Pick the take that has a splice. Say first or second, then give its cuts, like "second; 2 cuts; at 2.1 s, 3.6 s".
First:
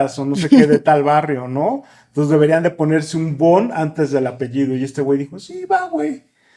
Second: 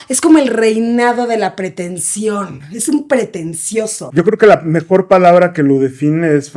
second; 1 cut; at 4.0 s